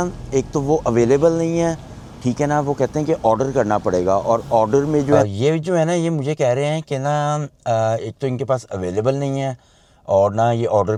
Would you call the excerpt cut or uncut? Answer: uncut